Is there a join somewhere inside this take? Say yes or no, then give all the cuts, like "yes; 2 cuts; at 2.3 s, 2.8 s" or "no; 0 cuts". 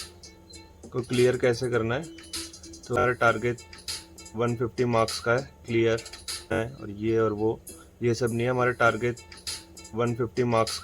yes; 2 cuts; at 3.0 s, 6.6 s